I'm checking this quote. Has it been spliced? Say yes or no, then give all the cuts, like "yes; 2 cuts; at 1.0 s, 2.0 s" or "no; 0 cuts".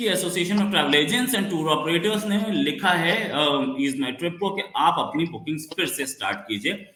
no; 0 cuts